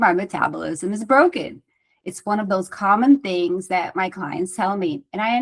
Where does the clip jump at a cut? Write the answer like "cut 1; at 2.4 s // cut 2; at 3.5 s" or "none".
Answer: none